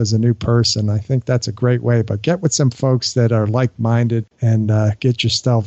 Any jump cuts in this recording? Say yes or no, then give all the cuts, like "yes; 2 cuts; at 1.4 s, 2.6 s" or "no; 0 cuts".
no; 0 cuts